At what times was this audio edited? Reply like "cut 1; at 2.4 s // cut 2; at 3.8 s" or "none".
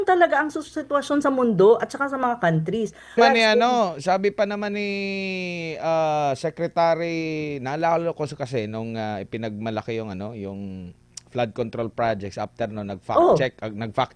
cut 1; at 3.2 s

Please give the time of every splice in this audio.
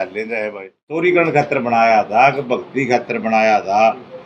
cut 1; at 1.0 s

